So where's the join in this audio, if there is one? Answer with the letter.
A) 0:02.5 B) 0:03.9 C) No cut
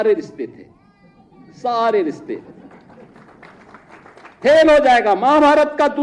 C